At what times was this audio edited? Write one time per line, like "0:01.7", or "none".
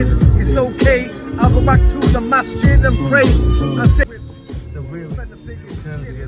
0:04.1